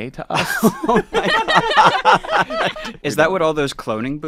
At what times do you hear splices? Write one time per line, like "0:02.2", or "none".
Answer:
0:02.9